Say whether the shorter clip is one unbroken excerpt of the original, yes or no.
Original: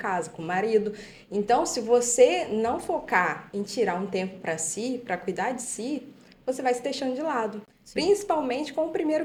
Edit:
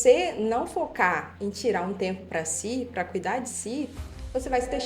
yes